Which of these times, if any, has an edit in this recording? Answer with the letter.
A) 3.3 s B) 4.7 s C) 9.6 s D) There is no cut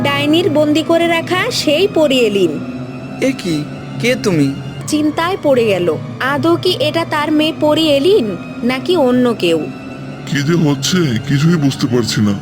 B